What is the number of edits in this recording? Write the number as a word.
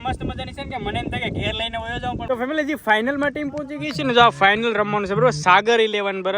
one